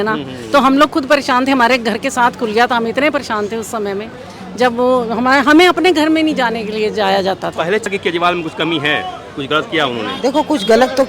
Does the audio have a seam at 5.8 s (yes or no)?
no